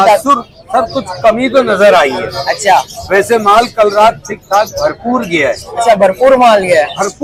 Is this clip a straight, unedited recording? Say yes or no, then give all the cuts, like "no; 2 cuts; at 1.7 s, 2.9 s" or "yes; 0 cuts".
yes; 0 cuts